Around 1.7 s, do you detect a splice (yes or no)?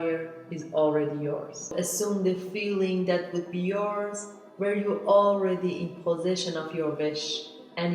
yes